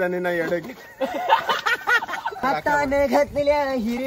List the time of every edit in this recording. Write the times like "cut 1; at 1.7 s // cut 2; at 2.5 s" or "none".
cut 1; at 2.4 s